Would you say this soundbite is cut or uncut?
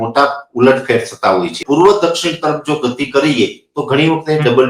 cut